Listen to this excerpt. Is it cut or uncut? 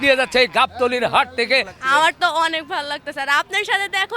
cut